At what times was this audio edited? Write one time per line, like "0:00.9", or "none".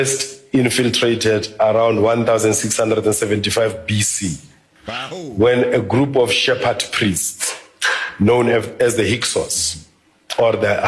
none